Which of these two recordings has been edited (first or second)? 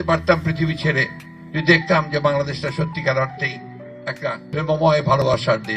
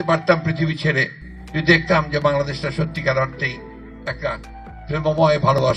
first